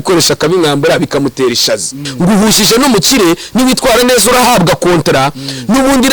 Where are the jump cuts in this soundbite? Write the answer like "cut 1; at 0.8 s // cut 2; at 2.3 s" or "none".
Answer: cut 1; at 2.1 s